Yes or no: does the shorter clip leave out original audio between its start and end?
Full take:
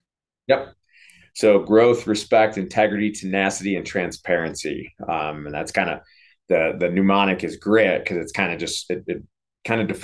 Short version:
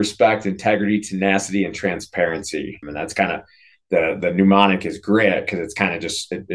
yes